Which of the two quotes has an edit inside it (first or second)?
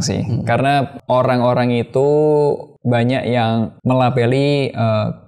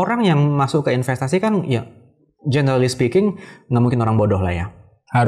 first